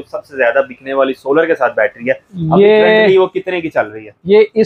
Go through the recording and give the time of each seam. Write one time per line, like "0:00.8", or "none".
none